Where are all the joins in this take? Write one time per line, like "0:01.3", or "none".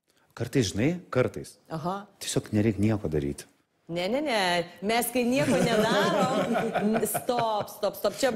none